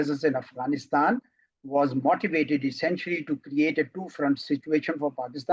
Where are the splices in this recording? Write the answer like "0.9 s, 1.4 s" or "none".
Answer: none